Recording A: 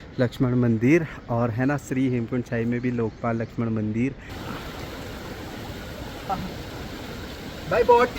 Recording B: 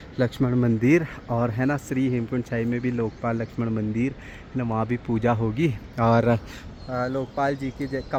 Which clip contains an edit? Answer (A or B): A